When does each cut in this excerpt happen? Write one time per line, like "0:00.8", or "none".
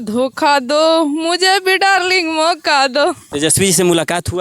0:03.3